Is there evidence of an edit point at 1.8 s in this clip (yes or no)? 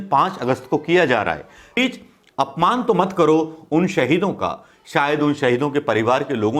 yes